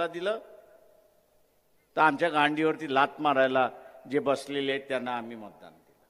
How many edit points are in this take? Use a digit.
0